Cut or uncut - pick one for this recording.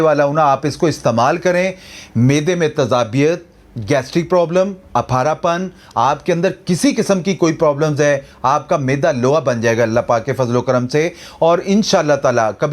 uncut